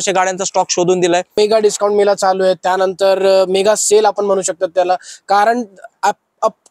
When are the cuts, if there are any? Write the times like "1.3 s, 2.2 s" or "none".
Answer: 1.3 s